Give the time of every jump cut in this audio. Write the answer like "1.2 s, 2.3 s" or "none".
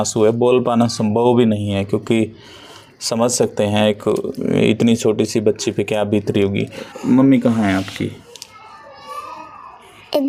none